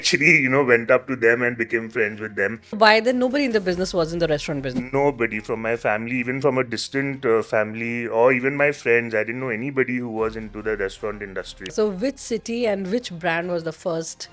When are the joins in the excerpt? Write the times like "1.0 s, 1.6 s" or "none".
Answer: 2.6 s, 11.7 s